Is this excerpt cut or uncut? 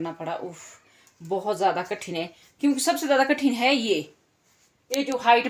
uncut